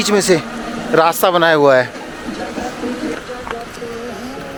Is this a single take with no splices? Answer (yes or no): yes